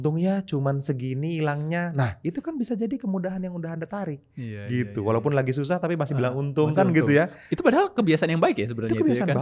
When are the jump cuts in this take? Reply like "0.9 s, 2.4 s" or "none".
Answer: none